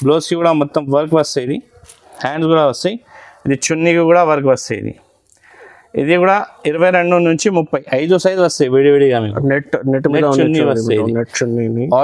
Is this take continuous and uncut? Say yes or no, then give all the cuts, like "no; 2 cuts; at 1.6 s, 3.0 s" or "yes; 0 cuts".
yes; 0 cuts